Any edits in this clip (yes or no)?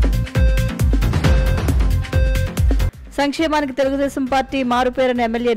yes